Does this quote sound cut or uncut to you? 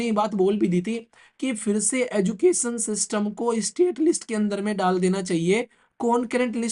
uncut